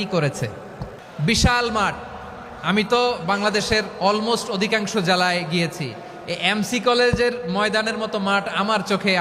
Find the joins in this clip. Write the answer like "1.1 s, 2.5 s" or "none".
1.0 s